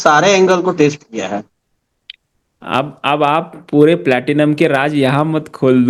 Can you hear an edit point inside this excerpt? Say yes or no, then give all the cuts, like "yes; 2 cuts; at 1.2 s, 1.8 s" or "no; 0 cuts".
no; 0 cuts